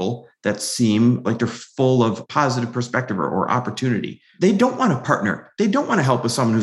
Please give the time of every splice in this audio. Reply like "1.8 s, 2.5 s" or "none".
1.2 s, 2.2 s